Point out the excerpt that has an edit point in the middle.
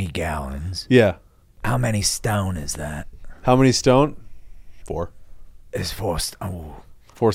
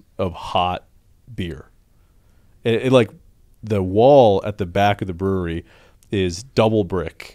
first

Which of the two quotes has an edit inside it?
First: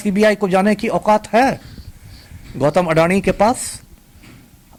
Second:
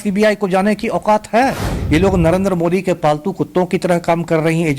second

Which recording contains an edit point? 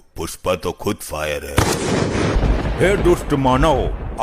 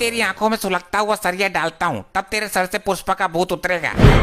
first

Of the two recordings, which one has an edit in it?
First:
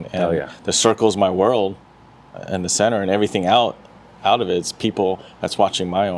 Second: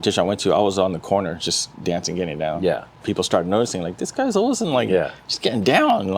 second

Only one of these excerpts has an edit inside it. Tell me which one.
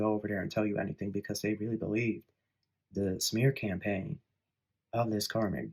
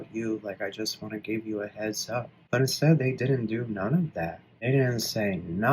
second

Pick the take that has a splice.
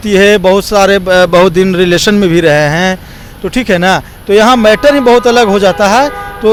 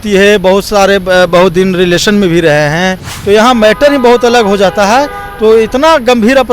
second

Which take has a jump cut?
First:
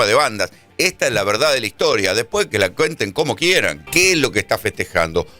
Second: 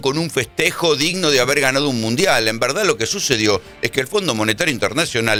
first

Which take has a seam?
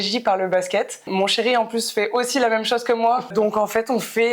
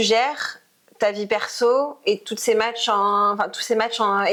first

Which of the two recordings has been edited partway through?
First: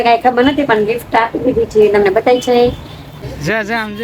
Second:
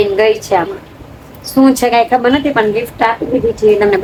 first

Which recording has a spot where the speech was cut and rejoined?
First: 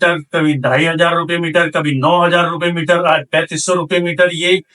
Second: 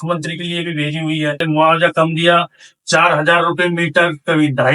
second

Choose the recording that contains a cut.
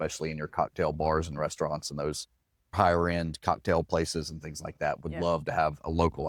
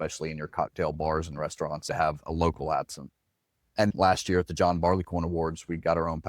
second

